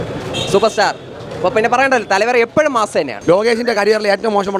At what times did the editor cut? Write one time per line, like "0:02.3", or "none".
0:03.1

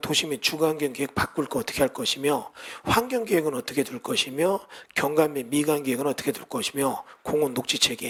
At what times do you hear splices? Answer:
none

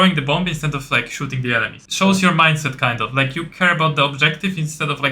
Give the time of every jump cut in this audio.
0:01.8

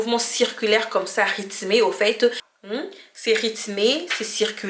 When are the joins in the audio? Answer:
0:02.4

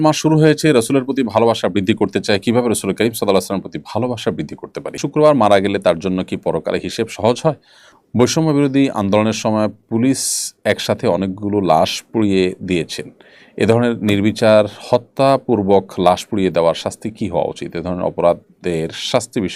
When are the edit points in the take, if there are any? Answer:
0:05.0
0:07.5

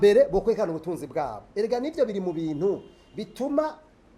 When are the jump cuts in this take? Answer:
none

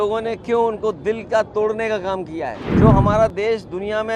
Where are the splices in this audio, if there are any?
0:02.7

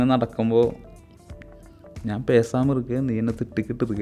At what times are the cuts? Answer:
none

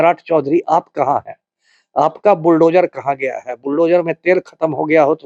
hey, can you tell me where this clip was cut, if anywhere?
none

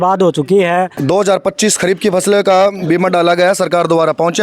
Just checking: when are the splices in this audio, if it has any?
0:00.9

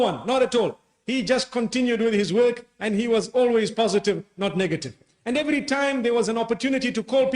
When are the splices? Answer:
0:05.0

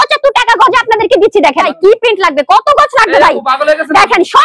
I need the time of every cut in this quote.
0:01.7

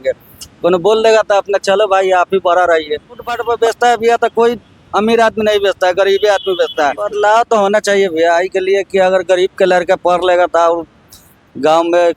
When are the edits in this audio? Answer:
0:03.3
0:07.0

